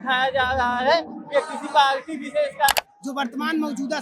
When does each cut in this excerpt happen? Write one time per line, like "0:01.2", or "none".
0:02.8